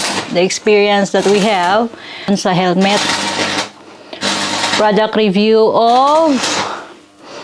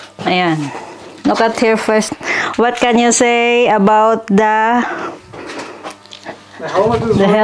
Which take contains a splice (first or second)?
first